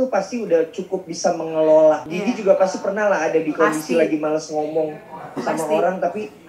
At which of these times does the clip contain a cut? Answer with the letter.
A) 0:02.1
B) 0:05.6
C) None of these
A